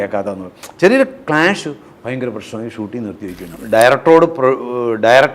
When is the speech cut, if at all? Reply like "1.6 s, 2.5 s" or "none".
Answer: 3.4 s